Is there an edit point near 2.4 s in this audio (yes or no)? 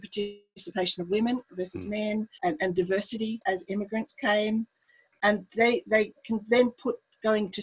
yes